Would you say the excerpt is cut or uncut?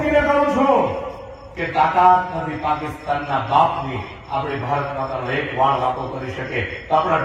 uncut